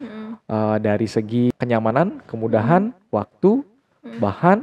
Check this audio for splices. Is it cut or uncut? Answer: cut